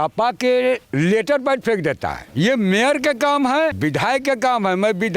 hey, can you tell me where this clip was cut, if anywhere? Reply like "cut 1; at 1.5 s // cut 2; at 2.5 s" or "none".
cut 1; at 0.9 s // cut 2; at 2.2 s // cut 3; at 3.8 s